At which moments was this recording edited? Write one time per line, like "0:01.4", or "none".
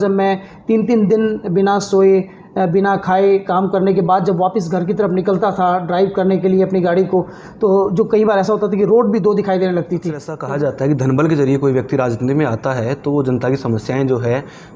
0:10.3